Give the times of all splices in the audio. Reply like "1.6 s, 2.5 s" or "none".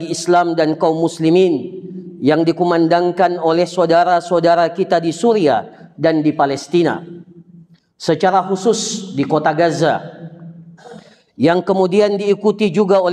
none